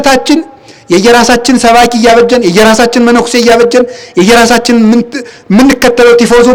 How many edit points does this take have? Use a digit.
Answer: 0